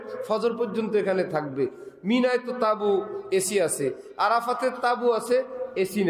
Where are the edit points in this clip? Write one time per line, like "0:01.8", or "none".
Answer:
none